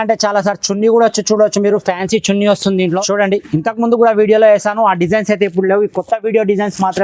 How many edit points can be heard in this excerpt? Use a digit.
1